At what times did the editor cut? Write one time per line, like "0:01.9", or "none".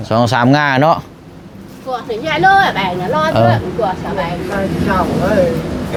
none